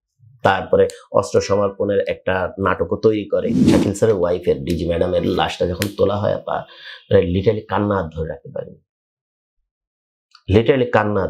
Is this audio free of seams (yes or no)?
no